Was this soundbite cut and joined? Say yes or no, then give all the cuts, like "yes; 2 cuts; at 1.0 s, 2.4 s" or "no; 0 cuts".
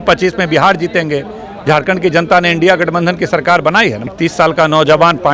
yes; 1 cut; at 4.0 s